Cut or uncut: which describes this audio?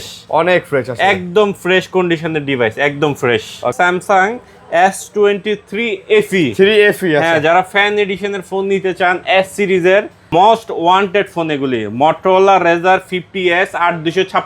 cut